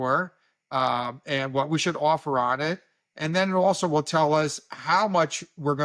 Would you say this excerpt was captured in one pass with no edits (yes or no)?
yes